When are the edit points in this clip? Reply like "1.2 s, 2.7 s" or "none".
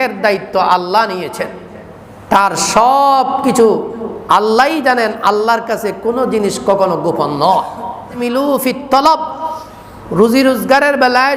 8.1 s